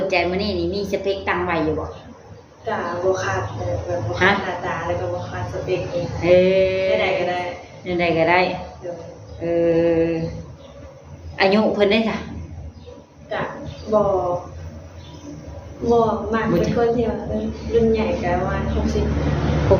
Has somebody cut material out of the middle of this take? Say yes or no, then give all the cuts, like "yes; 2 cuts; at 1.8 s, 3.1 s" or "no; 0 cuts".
no; 0 cuts